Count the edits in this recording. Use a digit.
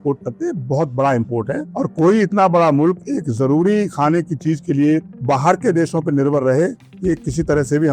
0